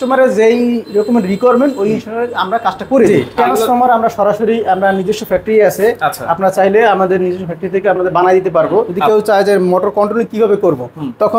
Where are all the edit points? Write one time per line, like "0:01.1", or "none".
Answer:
0:03.1
0:09.0